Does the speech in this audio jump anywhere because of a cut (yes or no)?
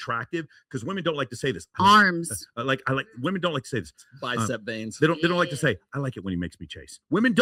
no